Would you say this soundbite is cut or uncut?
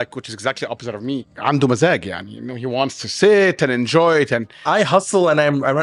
cut